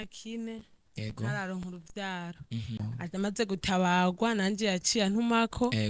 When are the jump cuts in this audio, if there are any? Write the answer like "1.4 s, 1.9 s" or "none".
2.8 s